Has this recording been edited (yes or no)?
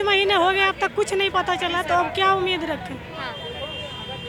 no